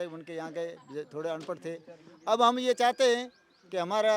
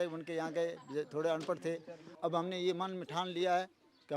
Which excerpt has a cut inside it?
second; 1 cut; at 2.1 s

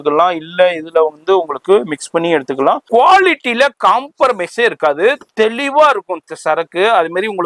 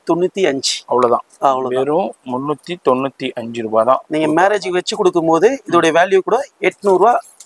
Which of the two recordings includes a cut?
first; 1 cut; at 2.8 s

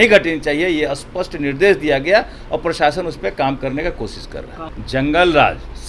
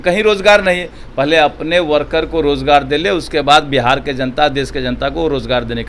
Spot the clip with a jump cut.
first; 1 cut; at 4.6 s

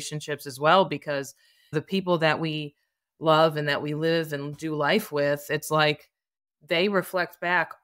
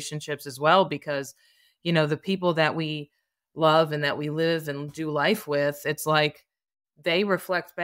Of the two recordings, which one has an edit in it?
first; 1 cut; at 1.7 s

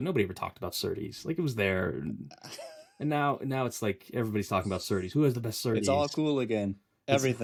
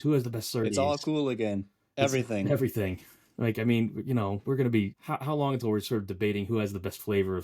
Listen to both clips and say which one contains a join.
second; 1 cut; at 5.0 s

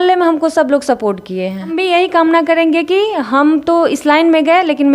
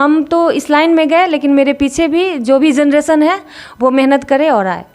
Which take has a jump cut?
first; 1 cut; at 1.7 s

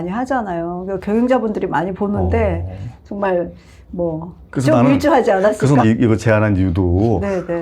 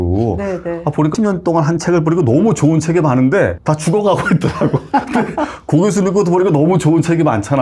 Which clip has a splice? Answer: first; 1 cut; at 5.8 s

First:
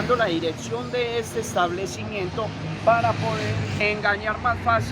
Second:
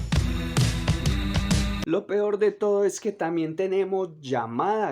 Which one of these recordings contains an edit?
second; 1 cut; at 1.8 s

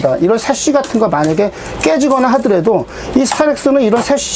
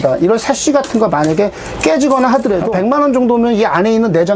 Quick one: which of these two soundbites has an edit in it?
second; 1 cut; at 2.7 s

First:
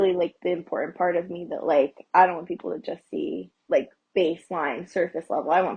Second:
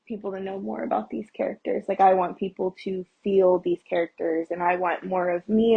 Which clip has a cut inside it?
first; 1 cut; at 3.5 s

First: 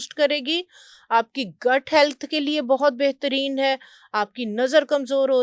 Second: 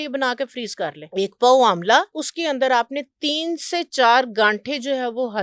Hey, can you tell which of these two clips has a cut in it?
second; 2 cuts; at 1.0 s, 2.2 s

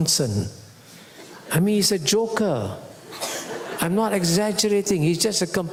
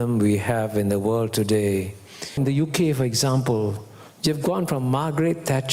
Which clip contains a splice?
second; 1 cut; at 2.4 s

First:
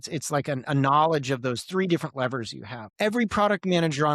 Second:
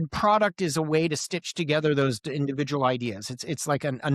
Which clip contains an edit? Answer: first; 1 cut; at 2.8 s

